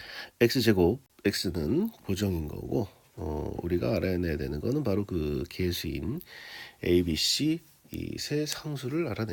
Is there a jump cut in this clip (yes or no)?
yes